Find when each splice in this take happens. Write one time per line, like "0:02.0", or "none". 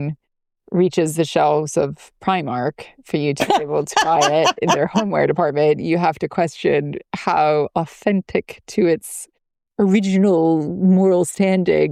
none